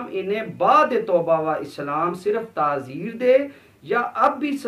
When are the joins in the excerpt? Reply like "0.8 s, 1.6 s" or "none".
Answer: none